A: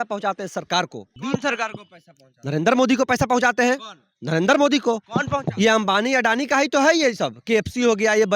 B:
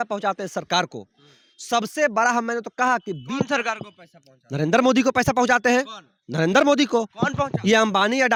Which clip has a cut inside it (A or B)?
A